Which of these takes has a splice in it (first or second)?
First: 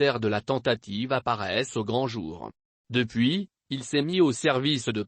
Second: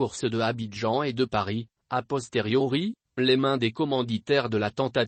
first